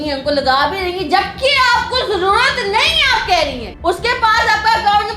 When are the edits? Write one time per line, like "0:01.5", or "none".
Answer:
0:03.7